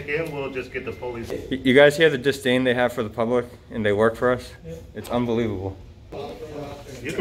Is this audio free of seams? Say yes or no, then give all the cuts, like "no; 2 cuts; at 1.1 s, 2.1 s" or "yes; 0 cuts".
no; 2 cuts; at 1.3 s, 6.2 s